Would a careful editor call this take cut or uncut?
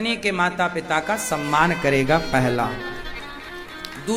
uncut